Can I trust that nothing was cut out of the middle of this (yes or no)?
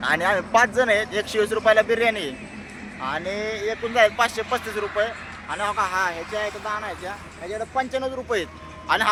yes